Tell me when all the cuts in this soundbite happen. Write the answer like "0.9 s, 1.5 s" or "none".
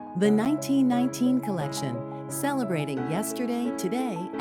none